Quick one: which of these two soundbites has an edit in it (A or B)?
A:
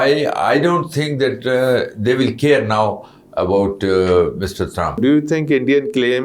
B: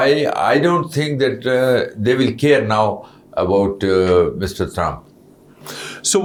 A